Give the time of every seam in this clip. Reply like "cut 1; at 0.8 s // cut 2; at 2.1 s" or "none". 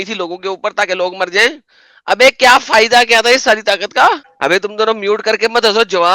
none